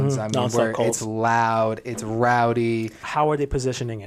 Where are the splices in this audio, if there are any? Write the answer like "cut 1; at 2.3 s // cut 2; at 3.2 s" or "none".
cut 1; at 3.0 s